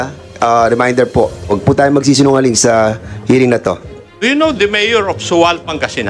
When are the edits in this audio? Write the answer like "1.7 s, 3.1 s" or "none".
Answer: 4.1 s